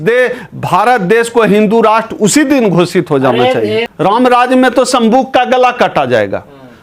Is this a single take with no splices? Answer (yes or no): no